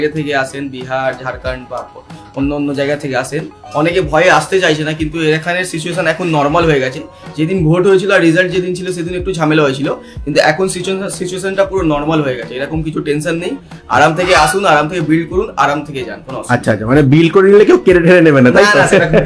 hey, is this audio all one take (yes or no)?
yes